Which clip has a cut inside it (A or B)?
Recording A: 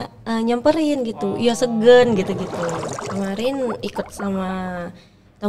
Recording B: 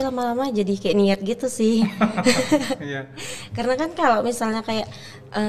A